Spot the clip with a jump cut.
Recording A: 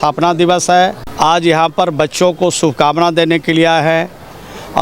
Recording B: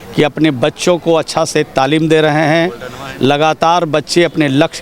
A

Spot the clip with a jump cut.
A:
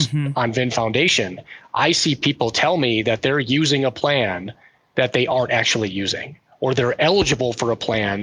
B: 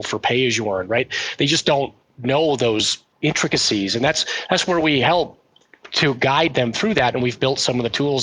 B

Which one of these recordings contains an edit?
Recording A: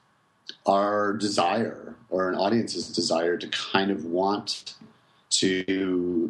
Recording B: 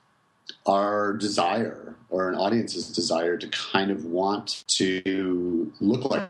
B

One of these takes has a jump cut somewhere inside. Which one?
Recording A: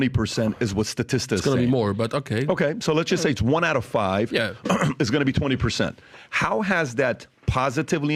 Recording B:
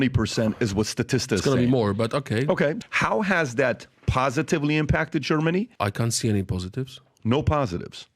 B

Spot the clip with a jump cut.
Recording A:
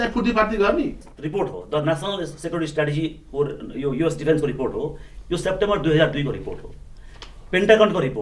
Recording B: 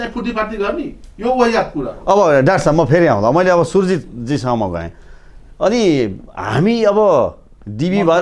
A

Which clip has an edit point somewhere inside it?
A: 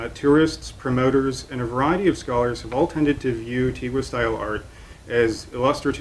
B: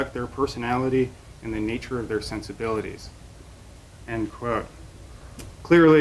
A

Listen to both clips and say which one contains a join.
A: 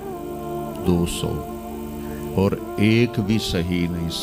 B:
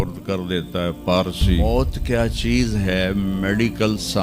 B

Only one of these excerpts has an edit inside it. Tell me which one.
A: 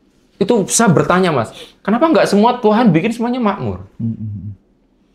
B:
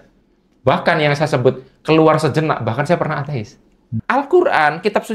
B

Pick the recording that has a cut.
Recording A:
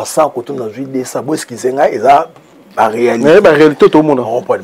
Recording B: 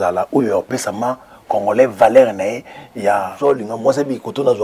B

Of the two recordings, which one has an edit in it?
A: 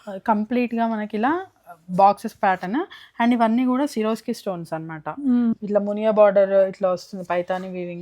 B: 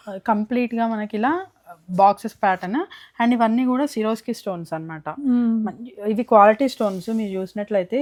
A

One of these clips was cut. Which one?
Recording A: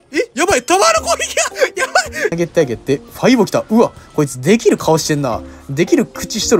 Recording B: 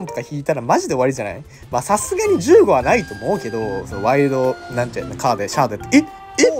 A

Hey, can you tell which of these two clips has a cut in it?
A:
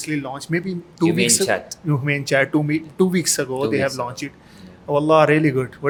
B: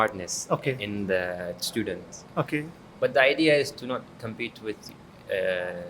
B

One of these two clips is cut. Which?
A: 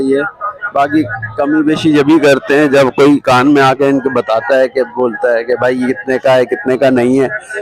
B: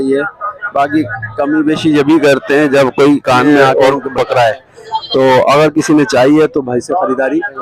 B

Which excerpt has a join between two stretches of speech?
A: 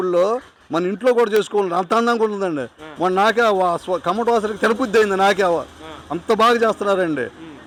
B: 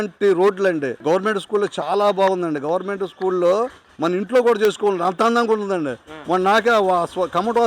B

